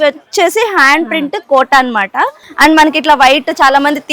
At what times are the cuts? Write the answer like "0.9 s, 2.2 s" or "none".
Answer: 2.4 s